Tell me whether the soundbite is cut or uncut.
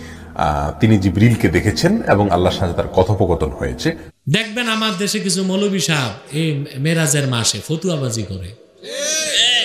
cut